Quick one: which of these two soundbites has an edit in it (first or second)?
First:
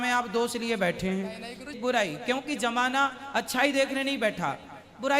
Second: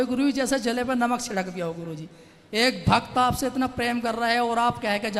first